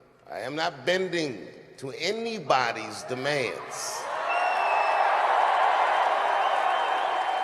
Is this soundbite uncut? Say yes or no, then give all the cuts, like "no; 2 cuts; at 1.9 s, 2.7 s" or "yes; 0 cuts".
no; 1 cut; at 5.7 s